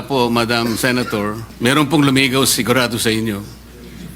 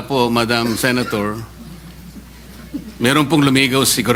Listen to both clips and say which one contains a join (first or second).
first